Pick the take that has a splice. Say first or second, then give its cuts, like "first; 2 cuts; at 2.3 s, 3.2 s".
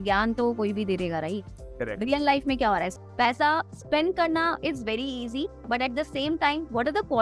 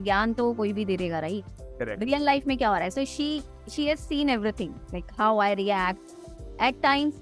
first; 1 cut; at 2.9 s